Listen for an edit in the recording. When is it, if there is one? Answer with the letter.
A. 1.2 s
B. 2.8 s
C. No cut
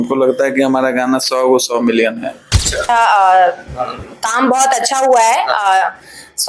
B